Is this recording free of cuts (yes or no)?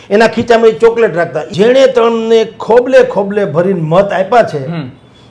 no